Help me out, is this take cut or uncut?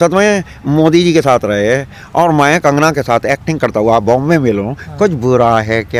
uncut